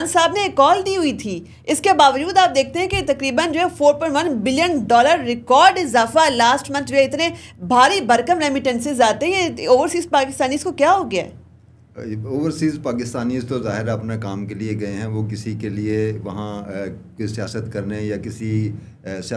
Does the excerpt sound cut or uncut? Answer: uncut